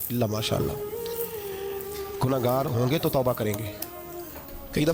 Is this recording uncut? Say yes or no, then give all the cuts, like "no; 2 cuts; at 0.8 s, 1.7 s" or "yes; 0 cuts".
yes; 0 cuts